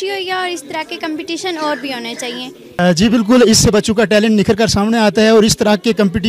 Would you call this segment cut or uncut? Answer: cut